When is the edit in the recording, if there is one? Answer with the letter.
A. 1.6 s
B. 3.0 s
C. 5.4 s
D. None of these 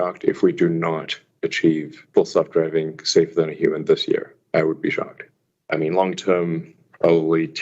C